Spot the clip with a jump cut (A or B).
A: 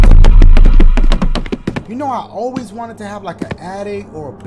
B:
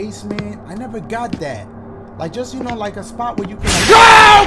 A